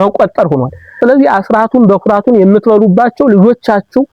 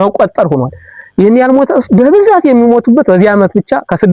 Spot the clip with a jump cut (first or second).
first